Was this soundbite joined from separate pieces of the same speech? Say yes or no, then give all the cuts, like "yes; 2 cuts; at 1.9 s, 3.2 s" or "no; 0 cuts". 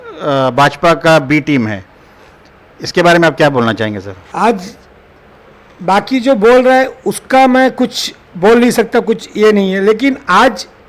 no; 0 cuts